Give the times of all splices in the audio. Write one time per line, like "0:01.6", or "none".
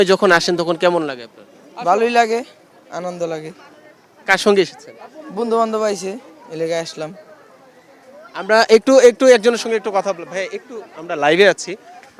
none